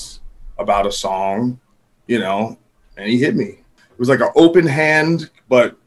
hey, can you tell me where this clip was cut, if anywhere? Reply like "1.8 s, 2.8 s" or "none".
3.8 s